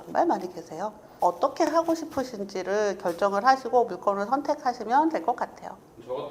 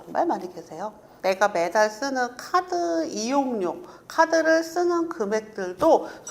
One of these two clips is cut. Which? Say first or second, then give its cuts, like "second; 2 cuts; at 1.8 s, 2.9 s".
second; 1 cut; at 1.1 s